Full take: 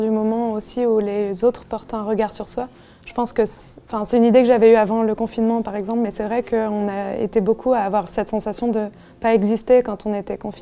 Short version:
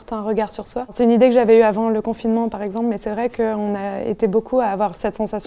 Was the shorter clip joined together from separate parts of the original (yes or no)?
yes